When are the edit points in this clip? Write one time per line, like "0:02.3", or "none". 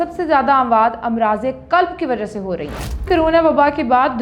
0:03.1